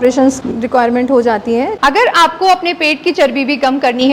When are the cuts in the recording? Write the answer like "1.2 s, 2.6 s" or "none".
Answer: 1.7 s